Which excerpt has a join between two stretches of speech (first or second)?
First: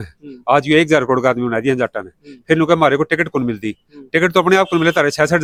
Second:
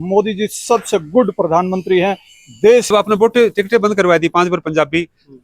second